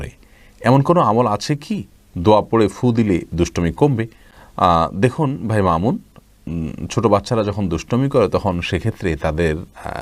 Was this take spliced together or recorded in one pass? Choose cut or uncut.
uncut